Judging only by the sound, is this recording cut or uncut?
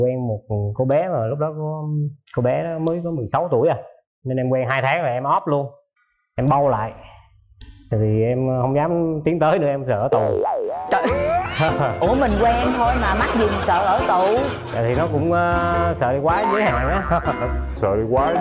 uncut